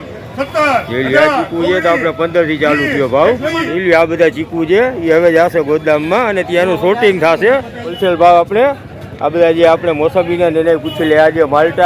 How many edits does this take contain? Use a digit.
2